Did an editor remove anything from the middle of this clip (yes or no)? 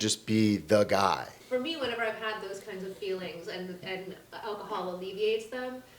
yes